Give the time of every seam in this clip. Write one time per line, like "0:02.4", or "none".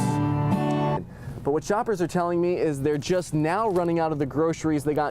0:01.0